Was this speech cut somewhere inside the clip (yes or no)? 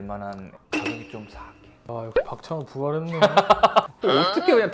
yes